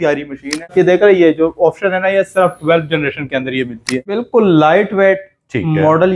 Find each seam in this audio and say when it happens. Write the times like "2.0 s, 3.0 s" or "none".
0.7 s, 4.1 s